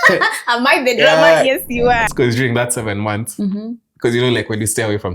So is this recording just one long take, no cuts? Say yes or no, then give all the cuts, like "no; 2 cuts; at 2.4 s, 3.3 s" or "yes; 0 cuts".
no; 1 cut; at 2.0 s